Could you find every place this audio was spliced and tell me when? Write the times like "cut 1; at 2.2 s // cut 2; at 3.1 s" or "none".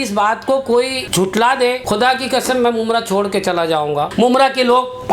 cut 1; at 1.0 s // cut 2; at 1.8 s // cut 3; at 4.1 s